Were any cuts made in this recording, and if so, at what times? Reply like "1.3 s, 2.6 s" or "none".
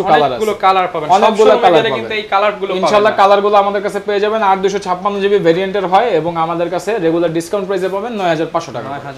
none